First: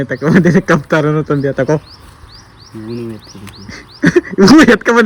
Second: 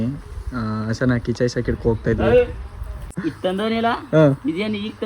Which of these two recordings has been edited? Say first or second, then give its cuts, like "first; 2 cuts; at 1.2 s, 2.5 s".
second; 1 cut; at 3.0 s